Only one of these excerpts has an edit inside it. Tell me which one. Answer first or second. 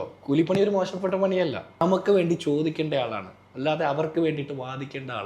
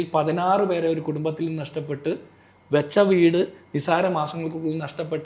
first